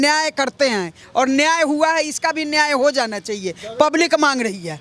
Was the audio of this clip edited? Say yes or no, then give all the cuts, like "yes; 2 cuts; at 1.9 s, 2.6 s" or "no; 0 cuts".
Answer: no; 0 cuts